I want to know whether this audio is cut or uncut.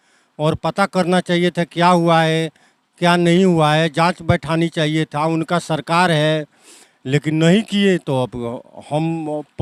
uncut